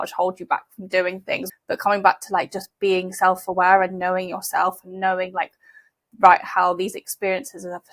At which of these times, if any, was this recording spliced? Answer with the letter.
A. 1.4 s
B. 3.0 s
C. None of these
A